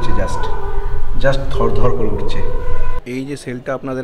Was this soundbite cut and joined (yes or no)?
yes